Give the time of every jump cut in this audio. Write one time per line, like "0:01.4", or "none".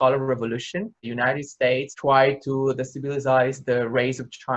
0:01.0